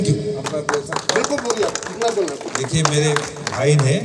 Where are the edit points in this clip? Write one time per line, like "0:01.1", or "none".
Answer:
none